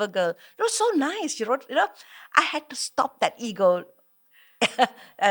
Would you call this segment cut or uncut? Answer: uncut